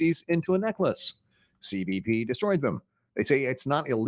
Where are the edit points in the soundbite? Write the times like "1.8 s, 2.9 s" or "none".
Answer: none